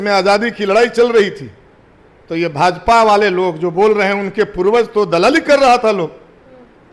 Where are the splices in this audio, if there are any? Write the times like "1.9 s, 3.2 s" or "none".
none